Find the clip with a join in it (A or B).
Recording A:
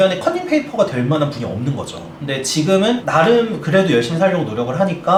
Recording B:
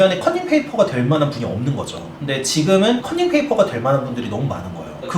B